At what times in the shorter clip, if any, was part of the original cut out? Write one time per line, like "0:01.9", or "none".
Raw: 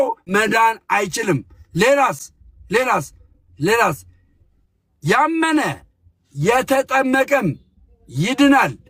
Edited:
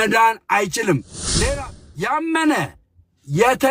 0:02.2